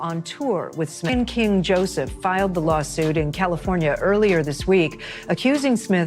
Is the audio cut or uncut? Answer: cut